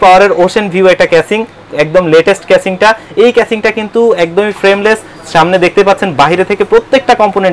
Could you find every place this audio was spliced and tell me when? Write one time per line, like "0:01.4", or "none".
none